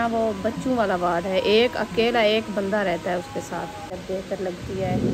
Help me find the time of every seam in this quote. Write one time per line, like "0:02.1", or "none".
0:04.0